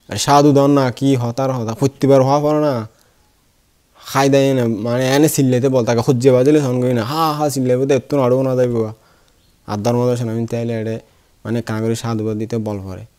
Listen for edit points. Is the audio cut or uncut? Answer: uncut